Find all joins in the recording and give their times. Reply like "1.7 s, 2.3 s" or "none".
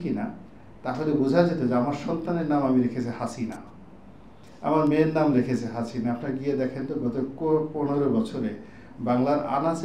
none